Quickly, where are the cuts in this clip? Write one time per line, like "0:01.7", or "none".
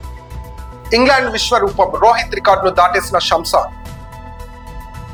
none